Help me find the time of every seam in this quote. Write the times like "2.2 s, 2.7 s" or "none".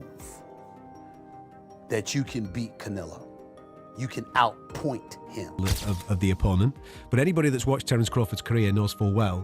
5.6 s